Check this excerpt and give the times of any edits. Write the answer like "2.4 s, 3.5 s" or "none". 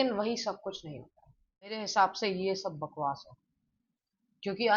1.8 s